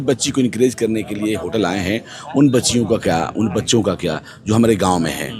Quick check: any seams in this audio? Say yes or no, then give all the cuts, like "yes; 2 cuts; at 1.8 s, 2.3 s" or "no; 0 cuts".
no; 0 cuts